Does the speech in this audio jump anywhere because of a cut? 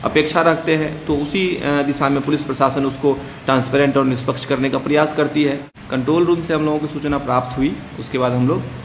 yes; 1 cut; at 5.7 s

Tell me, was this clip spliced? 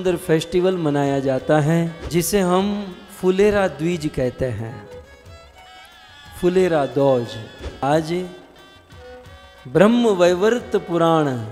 yes; 2 cuts; at 2.0 s, 7.8 s

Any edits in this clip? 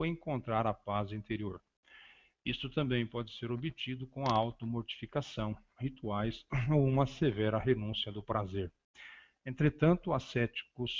no; 0 cuts

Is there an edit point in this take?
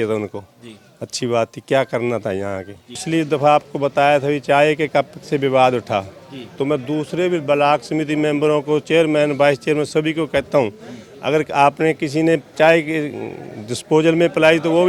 yes; 1 cut; at 3.0 s

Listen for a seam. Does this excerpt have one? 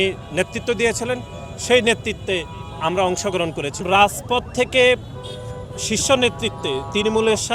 yes; 1 cut; at 3.8 s

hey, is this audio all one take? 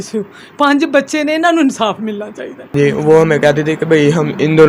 no; 1 cut; at 2.6 s

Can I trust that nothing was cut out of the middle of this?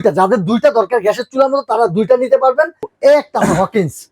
no; 1 cut; at 2.9 s

